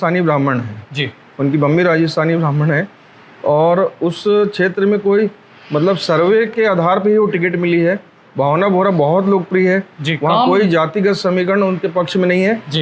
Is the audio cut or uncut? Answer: uncut